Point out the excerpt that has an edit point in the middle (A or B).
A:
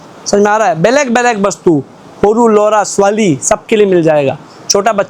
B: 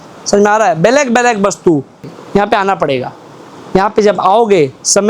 B